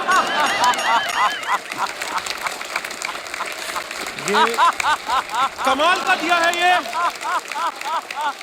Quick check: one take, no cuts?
yes; 0 cuts

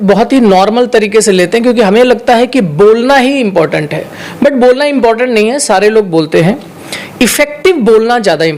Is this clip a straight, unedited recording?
yes; 0 cuts

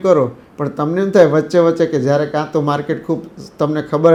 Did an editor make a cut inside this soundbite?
no; 0 cuts

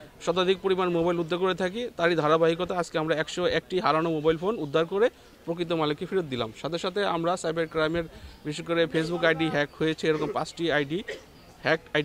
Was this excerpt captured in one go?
yes; 0 cuts

